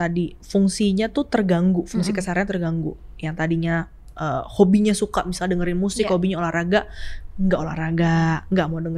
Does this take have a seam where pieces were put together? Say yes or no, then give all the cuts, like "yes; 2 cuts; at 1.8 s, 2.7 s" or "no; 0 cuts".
no; 0 cuts